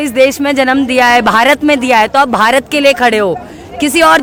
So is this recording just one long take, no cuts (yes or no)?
yes